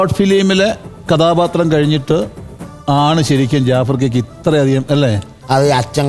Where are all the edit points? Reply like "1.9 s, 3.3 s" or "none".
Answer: none